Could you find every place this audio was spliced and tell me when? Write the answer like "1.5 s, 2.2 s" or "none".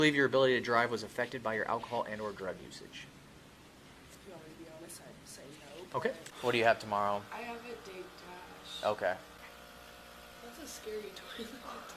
6.2 s, 9.4 s